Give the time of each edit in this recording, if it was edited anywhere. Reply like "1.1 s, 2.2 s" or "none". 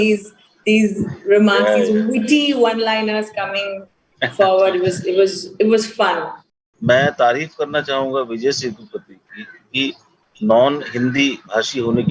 6.4 s